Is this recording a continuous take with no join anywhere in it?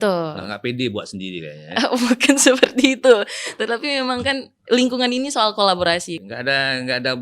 no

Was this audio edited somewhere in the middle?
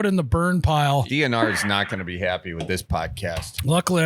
yes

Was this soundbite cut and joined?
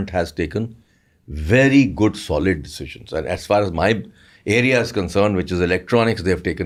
no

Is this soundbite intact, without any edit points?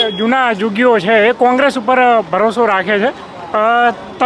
yes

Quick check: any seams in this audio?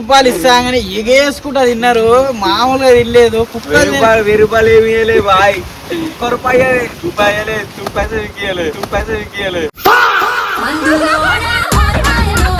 no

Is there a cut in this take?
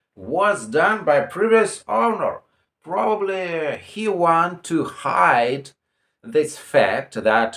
no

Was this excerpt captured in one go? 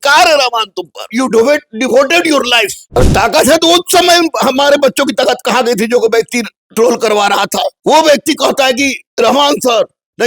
no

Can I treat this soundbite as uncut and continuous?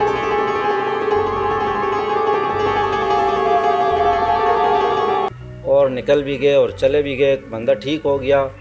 yes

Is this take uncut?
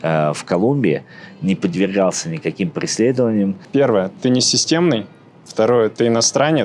no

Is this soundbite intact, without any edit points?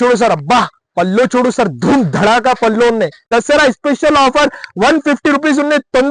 no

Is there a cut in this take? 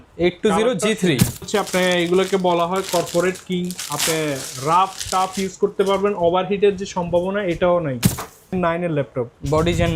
yes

